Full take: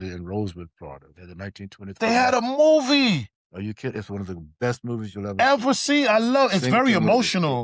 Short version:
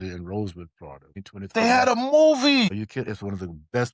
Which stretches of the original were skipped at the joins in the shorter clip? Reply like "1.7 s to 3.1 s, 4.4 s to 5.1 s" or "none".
1.2 s to 1.6 s, 3.2 s to 3.6 s